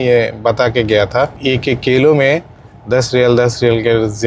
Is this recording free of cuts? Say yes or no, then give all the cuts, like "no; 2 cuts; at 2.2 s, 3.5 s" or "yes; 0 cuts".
no; 1 cut; at 1.4 s